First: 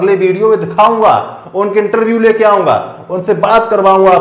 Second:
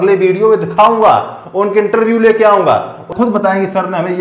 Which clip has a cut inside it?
second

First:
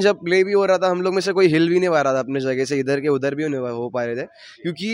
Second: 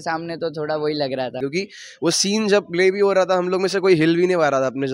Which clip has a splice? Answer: second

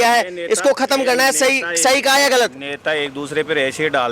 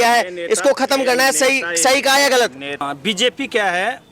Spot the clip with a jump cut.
second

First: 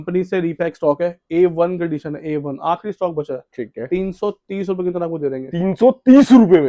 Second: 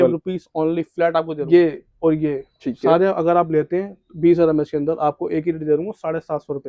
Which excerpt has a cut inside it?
second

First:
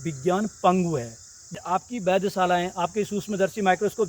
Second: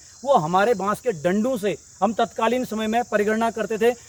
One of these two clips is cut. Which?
first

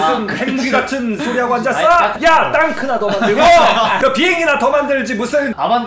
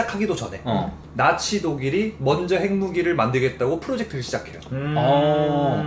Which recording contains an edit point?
first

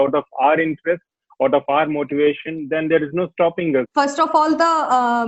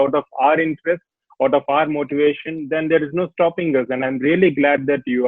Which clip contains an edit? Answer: first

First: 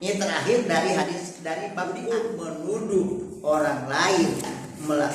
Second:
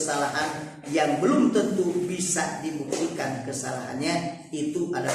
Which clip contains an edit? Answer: first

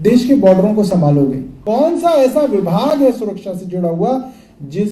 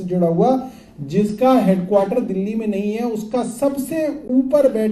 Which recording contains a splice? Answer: first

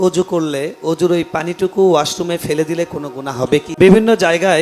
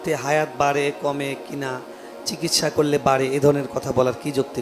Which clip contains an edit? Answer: first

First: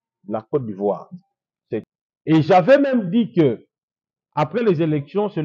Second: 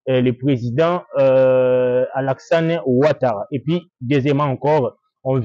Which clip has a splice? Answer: first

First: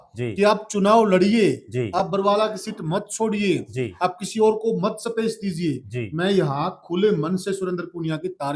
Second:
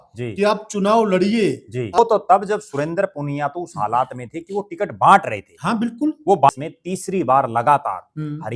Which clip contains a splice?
second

